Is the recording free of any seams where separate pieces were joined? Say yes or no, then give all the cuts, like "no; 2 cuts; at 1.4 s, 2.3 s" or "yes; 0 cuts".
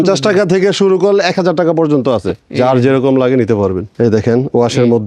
no; 2 cuts; at 2.4 s, 3.9 s